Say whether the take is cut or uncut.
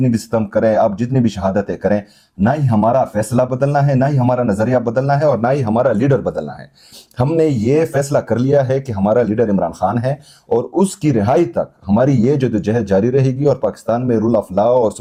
uncut